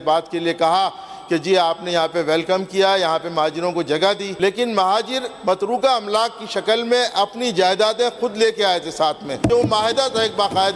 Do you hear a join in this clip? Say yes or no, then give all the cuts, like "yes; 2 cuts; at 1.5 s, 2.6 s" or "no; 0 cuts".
yes; 2 cuts; at 4.3 s, 9.5 s